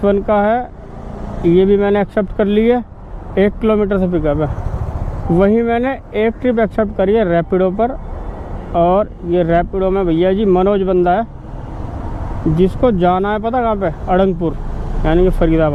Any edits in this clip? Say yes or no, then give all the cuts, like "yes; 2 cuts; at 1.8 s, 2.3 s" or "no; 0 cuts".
no; 0 cuts